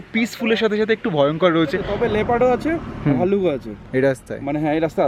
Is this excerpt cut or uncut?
cut